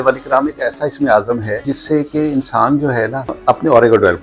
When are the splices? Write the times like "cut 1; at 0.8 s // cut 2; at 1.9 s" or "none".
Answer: cut 1; at 1.7 s // cut 2; at 3.4 s